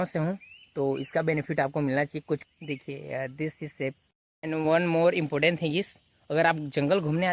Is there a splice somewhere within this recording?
yes; 2 cuts; at 2.4 s, 4.0 s

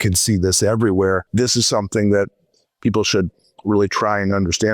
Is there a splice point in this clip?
yes; 1 cut; at 1.3 s

